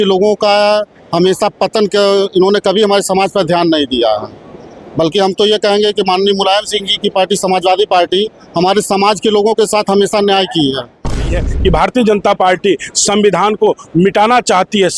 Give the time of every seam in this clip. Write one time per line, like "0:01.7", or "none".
0:11.2